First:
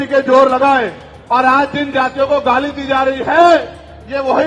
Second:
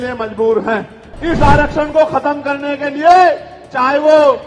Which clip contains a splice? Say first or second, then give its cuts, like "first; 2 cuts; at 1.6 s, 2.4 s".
second; 1 cut; at 1.1 s